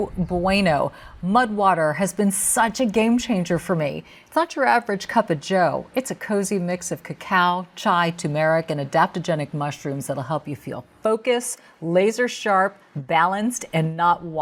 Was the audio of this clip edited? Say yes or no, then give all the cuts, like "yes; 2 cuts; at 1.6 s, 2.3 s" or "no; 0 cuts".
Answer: no; 0 cuts